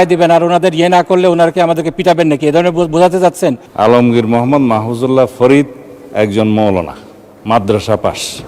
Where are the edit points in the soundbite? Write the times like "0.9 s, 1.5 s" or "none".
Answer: 3.6 s